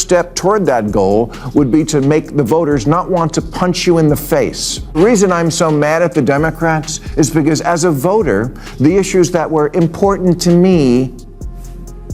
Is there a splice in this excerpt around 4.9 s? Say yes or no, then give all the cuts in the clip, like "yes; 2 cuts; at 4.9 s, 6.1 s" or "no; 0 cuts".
yes; 1 cut; at 4.9 s